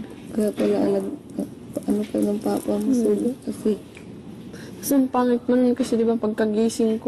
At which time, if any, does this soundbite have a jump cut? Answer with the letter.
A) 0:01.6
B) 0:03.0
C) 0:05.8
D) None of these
D